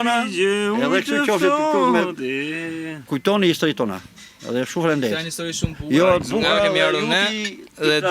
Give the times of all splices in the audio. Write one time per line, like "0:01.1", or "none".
0:03.0